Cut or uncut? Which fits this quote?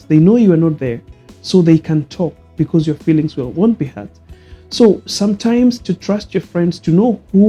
uncut